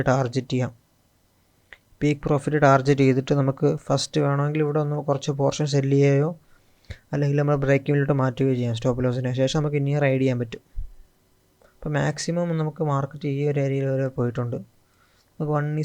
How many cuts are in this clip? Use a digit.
0